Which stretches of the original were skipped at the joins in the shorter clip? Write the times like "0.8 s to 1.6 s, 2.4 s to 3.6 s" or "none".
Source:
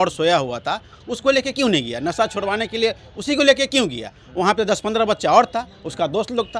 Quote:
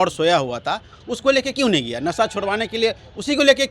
none